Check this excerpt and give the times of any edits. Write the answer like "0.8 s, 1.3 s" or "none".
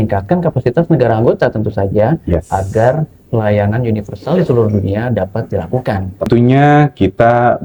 6.3 s